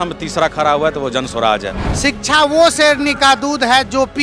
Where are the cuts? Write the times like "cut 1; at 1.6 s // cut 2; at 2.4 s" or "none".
cut 1; at 1.8 s